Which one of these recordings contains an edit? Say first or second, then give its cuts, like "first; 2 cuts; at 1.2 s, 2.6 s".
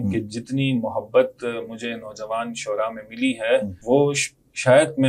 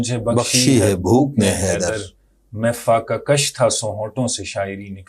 first; 1 cut; at 3.7 s